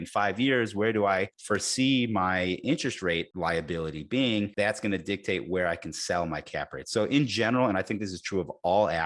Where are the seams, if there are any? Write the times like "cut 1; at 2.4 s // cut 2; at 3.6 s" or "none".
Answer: cut 1; at 1.4 s // cut 2; at 3.3 s // cut 3; at 4.5 s